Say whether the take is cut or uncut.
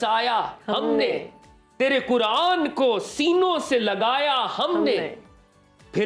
uncut